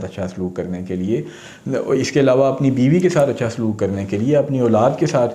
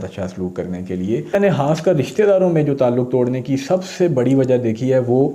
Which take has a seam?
second; 1 cut; at 1.4 s

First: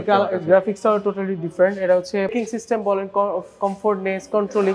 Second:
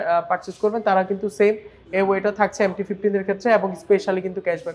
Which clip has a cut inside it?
first; 1 cut; at 2.3 s

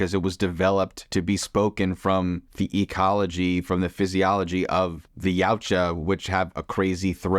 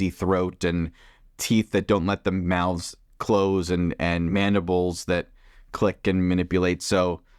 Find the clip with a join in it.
first; 3 cuts; at 1.0 s, 2.5 s, 5.1 s

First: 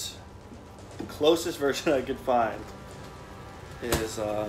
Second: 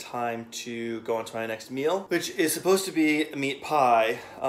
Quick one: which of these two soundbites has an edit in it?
second; 1 cut; at 2.0 s

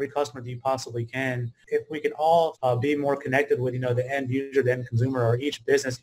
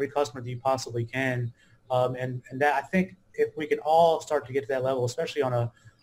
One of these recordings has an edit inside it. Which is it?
first; 2 cuts; at 1.5 s, 2.5 s

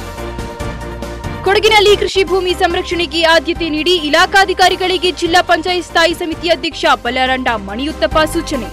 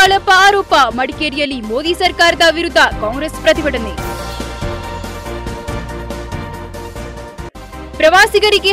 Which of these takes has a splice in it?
first; 1 cut; at 1.3 s

